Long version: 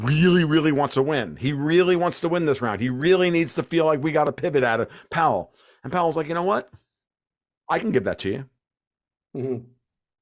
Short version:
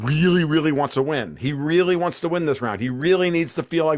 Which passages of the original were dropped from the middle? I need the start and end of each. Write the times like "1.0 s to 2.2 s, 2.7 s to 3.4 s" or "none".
none